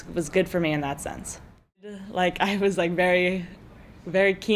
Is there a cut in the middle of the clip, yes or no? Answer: yes